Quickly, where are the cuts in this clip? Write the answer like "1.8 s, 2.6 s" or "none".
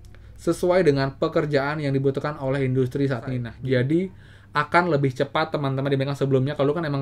3.5 s

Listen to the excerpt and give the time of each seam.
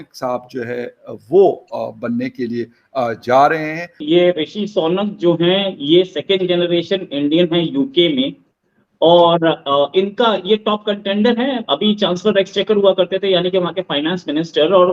none

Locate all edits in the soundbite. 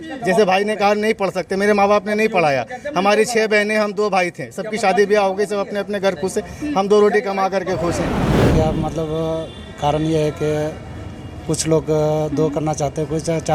8.4 s

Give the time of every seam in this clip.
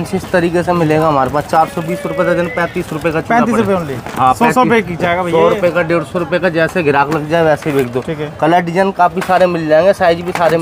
none

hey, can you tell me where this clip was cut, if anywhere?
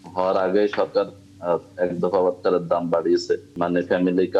3.5 s

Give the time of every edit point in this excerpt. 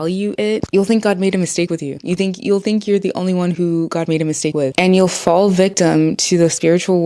none

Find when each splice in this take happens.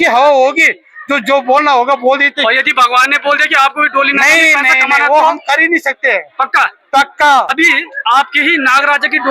7.5 s

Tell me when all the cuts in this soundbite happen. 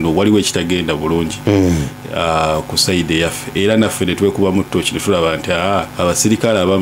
5.9 s

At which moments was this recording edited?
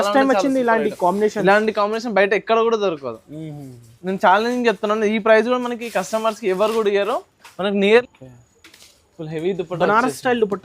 8.0 s

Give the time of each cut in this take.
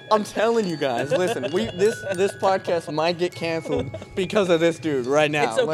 none

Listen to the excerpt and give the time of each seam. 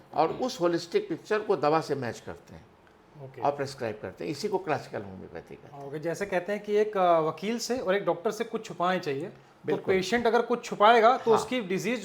none

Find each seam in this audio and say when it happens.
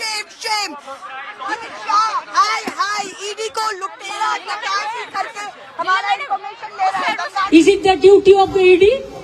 1.5 s, 7.3 s

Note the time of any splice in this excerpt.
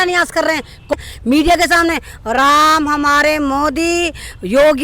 0.9 s

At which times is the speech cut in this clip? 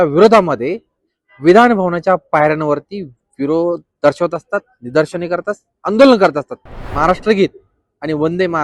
6.9 s

